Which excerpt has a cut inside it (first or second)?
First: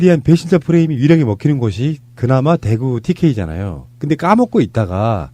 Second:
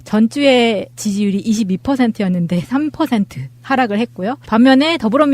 second